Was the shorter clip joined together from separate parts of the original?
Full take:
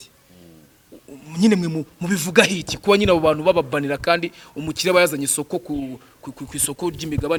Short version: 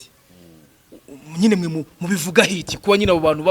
no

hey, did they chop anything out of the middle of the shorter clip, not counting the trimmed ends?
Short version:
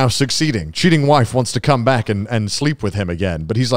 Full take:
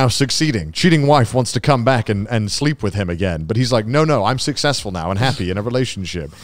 no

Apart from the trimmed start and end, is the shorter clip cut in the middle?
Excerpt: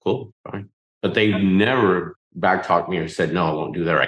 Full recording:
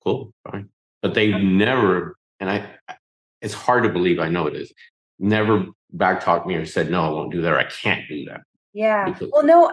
yes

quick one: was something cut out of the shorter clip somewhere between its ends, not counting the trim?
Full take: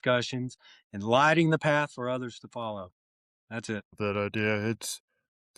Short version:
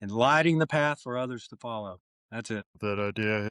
yes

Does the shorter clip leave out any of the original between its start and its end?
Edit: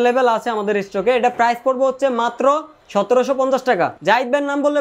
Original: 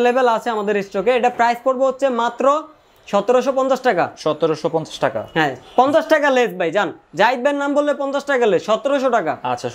yes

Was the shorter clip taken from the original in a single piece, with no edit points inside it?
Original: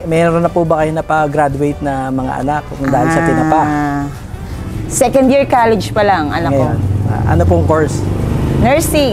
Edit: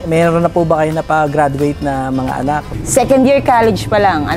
no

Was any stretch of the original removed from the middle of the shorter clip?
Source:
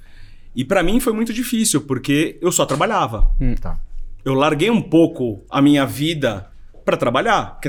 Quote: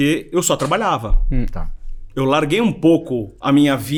no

